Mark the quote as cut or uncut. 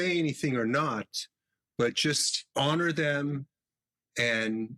cut